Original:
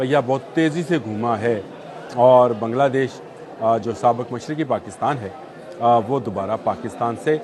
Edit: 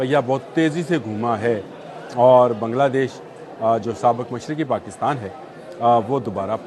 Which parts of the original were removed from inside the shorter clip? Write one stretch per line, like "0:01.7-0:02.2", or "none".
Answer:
none